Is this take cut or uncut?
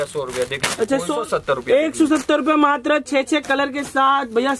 cut